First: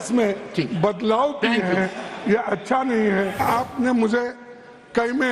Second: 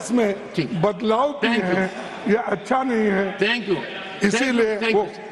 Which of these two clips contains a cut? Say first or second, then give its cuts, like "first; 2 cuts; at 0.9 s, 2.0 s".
first; 1 cut; at 3.4 s